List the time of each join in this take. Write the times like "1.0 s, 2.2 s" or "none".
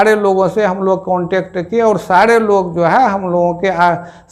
none